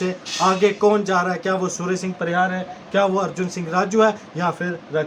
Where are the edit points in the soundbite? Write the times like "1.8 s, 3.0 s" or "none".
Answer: none